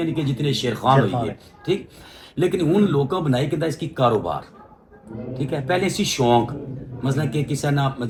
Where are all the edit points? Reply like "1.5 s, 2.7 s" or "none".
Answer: none

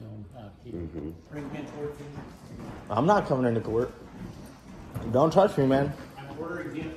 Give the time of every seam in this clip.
1.2 s

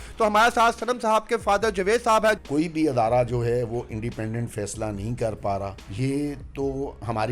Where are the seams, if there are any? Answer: 2.4 s, 5.8 s

